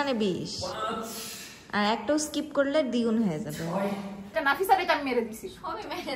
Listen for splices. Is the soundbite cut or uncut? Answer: cut